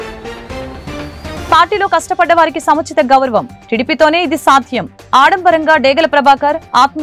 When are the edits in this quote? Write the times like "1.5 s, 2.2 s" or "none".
1.4 s